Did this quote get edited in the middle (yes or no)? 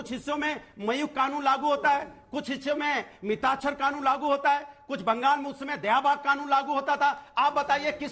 no